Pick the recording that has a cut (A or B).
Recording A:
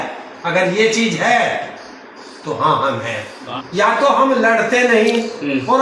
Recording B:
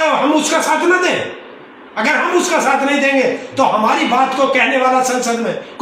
A